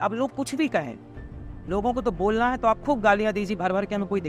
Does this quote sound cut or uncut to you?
uncut